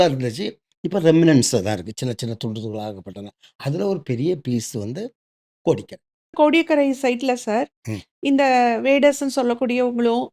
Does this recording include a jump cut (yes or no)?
yes